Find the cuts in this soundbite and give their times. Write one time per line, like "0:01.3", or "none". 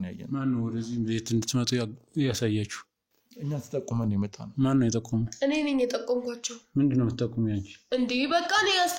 none